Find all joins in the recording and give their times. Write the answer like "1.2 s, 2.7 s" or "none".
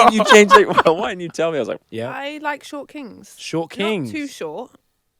1.8 s